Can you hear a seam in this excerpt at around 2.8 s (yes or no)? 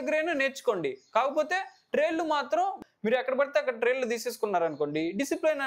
yes